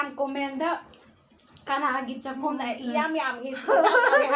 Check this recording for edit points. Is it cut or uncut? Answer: uncut